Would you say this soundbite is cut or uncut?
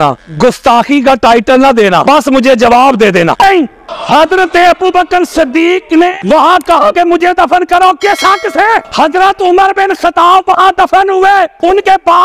cut